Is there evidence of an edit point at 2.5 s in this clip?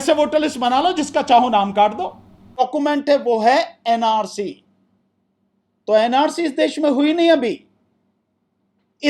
yes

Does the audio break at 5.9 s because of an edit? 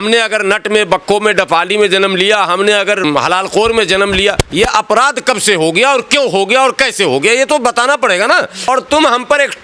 no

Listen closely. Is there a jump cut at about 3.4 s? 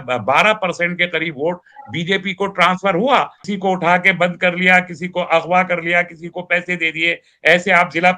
yes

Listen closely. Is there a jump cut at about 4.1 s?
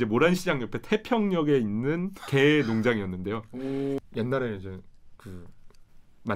yes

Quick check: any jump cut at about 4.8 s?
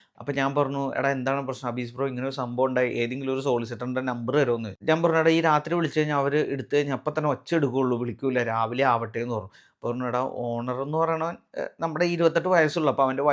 yes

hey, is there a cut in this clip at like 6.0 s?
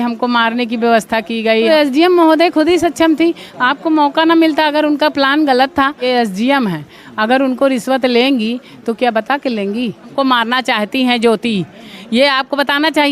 yes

